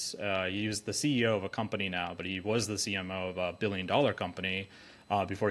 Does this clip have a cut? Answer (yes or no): no